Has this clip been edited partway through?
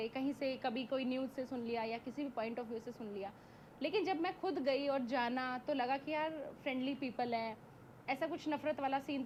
no; 0 cuts

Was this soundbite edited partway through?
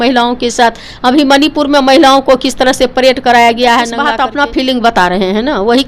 yes; 1 cut; at 4.0 s

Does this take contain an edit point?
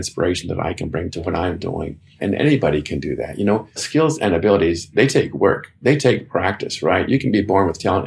yes; 3 cuts; at 1.1 s, 3.8 s, 4.9 s

